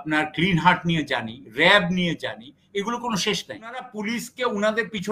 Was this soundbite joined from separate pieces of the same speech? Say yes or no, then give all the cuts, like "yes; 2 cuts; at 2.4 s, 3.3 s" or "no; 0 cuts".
yes; 1 cut; at 3.9 s